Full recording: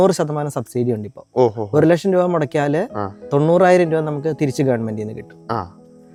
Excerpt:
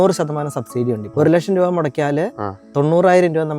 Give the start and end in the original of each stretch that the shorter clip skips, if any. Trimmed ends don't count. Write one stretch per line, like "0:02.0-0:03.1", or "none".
0:01.1-0:01.6